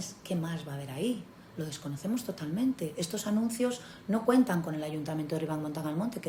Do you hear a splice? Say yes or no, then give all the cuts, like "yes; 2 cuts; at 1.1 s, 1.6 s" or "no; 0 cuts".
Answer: no; 0 cuts